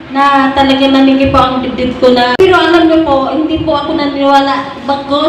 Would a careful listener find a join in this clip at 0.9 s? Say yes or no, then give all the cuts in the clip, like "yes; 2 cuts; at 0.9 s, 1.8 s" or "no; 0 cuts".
no; 1 cut; at 2.4 s